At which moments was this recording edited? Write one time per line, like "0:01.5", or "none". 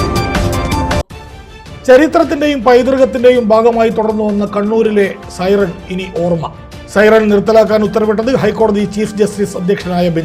none